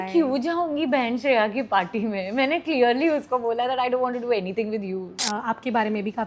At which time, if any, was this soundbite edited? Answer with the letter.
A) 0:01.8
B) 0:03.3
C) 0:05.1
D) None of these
C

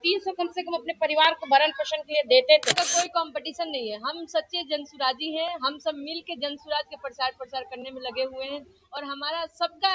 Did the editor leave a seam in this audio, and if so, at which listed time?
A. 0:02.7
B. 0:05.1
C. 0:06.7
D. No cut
A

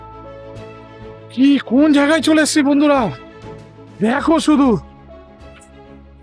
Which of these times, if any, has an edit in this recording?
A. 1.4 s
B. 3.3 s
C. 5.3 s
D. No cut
C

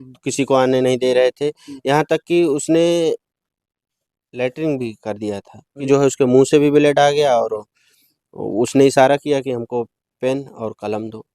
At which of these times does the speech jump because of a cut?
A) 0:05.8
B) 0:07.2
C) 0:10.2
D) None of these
A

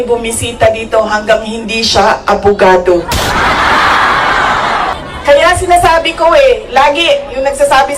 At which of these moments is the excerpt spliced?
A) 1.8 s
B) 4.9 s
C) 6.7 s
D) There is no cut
B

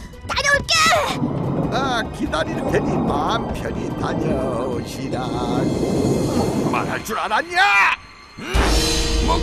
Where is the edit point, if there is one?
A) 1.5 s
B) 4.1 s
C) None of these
A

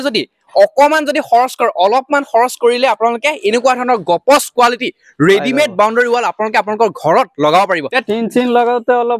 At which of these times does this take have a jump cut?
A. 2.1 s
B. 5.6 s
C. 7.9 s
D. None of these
C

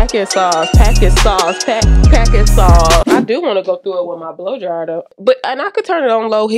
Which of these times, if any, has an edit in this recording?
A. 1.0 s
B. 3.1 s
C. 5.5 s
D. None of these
B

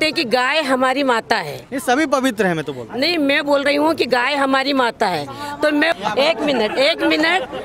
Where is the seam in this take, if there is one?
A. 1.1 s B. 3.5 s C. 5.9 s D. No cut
C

